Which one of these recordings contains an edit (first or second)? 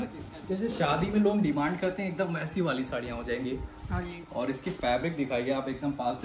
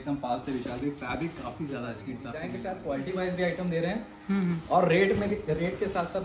second